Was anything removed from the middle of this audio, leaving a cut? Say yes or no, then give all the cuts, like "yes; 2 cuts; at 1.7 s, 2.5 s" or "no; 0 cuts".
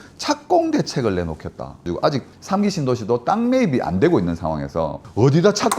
yes; 1 cut; at 1.9 s